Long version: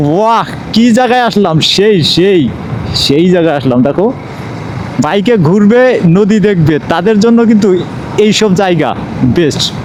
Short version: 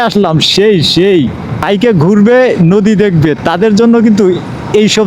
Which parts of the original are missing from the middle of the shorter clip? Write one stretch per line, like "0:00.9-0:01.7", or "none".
0:02.8-0:05.1